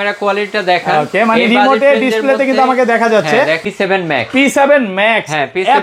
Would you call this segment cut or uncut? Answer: cut